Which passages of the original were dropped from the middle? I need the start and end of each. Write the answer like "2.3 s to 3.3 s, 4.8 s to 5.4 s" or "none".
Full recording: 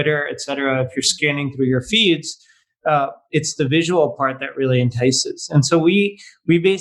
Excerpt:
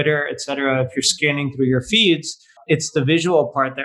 2.5 s to 3.2 s